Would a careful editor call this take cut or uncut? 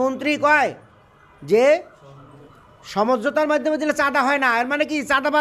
uncut